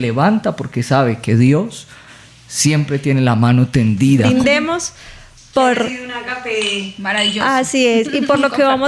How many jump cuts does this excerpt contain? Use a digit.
1